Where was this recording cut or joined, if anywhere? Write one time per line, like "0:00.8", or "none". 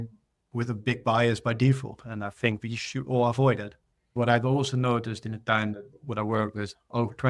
0:04.1